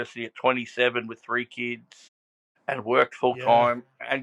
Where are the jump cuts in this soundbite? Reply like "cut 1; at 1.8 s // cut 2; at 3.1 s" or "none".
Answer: none